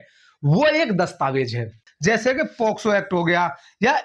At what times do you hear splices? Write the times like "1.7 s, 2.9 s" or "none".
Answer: 1.8 s